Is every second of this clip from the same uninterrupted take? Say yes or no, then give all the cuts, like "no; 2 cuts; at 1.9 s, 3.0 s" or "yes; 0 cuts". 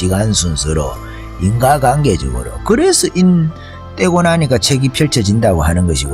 yes; 0 cuts